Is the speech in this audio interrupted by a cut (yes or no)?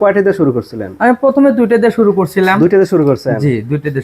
no